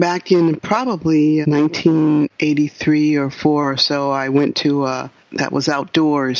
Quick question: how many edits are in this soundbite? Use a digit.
2